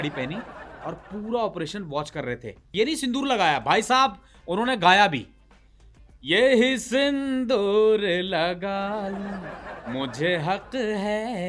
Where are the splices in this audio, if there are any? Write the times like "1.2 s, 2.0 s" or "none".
2.7 s